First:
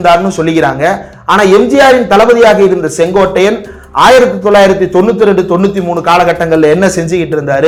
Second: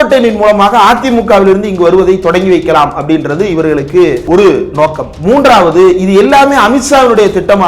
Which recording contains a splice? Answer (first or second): second